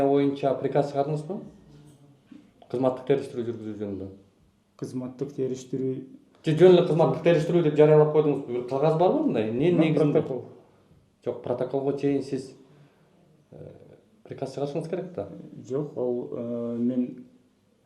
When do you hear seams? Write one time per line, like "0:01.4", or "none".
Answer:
none